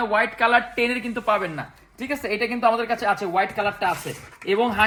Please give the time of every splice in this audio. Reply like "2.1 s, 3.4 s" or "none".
none